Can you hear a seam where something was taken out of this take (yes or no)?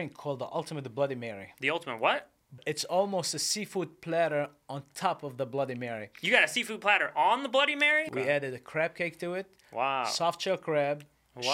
yes